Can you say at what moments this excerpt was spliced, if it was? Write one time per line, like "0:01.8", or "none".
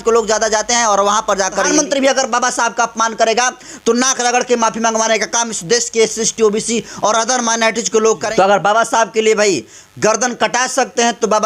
0:01.7
0:08.2